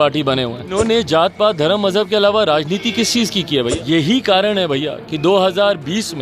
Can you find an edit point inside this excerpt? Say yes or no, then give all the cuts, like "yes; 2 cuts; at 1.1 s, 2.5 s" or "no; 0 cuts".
yes; 2 cuts; at 0.8 s, 3.8 s